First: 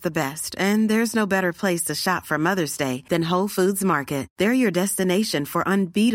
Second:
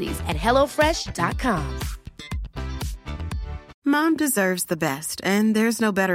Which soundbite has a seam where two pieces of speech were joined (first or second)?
second